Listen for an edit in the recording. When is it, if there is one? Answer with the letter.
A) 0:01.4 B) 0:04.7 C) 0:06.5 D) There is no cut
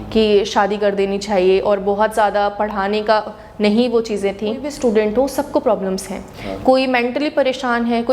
B